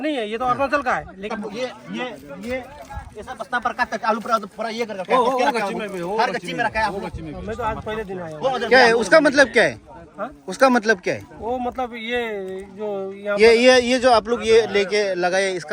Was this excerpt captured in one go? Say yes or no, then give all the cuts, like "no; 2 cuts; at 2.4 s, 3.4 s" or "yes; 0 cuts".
yes; 0 cuts